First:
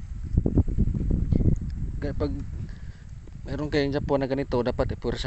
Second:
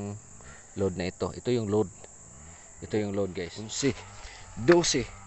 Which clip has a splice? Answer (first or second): second